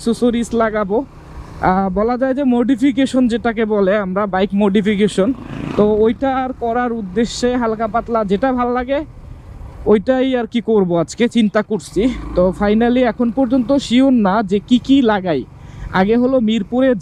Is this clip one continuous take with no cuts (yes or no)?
yes